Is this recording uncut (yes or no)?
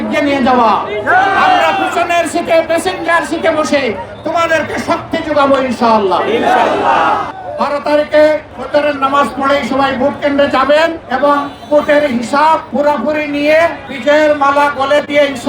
no